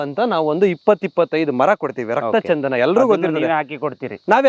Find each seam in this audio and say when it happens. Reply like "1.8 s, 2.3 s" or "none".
none